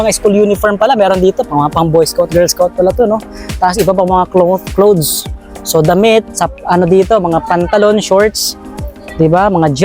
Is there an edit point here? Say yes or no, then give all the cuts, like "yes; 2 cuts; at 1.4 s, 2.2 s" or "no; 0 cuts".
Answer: no; 0 cuts